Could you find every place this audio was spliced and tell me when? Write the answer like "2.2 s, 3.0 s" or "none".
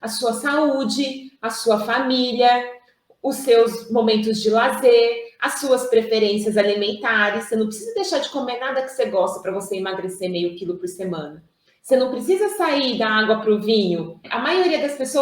14.3 s